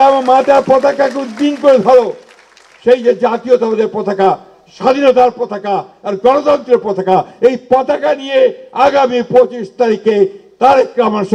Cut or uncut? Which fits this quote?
uncut